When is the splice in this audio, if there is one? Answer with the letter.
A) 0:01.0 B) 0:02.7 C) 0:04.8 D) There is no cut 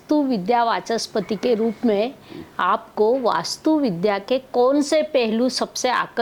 D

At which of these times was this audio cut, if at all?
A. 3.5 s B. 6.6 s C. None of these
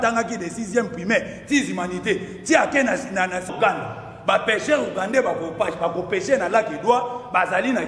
A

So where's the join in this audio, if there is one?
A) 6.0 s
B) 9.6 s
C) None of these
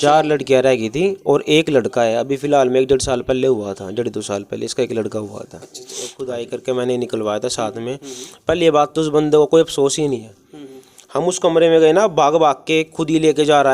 A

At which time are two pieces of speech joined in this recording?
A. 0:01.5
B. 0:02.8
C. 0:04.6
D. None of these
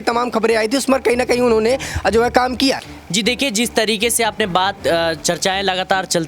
B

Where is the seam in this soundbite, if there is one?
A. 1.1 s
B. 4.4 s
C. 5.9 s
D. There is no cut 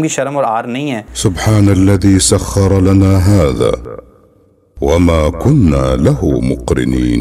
A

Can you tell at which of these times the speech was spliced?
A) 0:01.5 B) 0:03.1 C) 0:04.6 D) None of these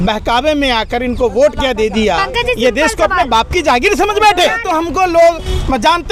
C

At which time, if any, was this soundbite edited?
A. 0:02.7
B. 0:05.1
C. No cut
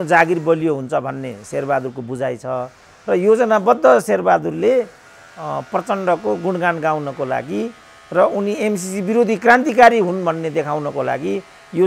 C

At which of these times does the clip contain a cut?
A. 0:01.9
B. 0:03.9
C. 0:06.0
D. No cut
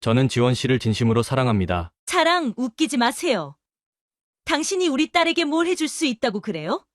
A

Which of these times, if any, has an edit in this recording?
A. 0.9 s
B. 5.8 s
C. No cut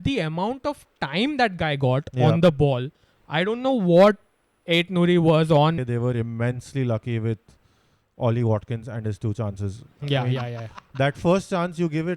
B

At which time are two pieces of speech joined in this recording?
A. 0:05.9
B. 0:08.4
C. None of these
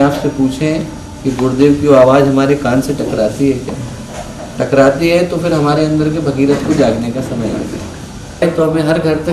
B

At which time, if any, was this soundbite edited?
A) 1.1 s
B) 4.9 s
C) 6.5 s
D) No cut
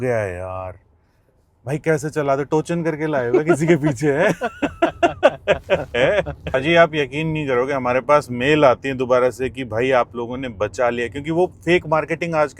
C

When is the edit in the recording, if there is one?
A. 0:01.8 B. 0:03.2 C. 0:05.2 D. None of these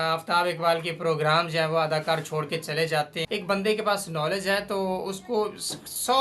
B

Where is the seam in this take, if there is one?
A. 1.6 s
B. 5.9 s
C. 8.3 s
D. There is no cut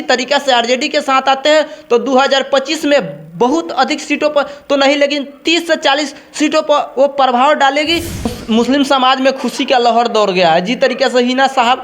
C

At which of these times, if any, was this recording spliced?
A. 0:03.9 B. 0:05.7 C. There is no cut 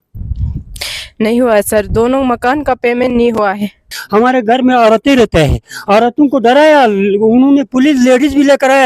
A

